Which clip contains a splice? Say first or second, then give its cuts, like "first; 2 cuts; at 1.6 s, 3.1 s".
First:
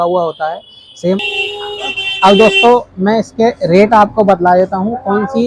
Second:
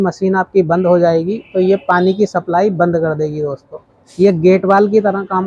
first; 1 cut; at 1.2 s